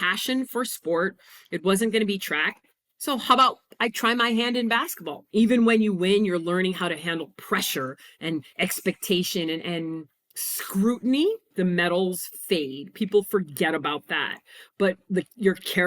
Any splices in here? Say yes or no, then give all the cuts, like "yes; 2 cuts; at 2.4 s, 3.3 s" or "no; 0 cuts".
yes; 2 cuts; at 5.1 s, 11.5 s